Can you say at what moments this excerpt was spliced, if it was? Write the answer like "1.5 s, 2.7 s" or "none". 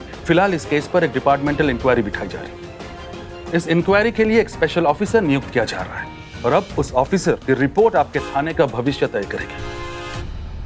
9.4 s